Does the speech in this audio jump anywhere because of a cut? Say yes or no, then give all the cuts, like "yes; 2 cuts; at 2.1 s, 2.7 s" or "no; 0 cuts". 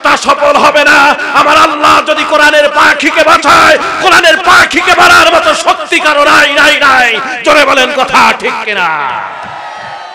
no; 0 cuts